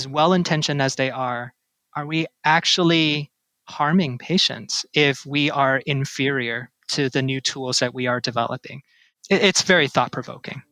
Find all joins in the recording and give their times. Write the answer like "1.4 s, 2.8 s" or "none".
9.2 s